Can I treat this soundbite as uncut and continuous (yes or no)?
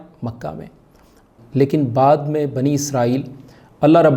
no